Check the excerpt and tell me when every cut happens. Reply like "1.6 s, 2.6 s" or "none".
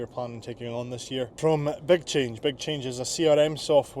1.3 s